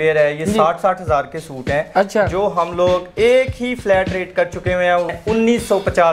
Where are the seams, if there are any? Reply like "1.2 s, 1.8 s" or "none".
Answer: 5.1 s